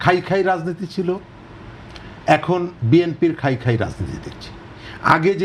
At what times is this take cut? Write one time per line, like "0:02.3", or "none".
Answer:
none